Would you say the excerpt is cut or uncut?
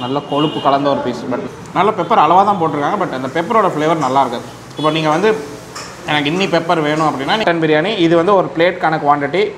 cut